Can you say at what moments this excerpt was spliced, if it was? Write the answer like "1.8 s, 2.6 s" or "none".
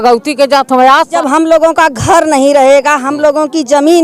1.1 s